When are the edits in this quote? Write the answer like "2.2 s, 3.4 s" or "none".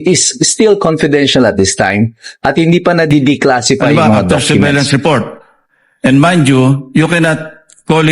4.7 s